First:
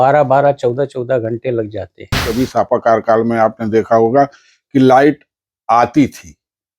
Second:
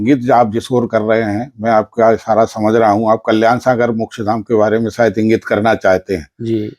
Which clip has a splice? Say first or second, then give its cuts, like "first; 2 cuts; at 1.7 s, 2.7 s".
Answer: first; 1 cut; at 2.3 s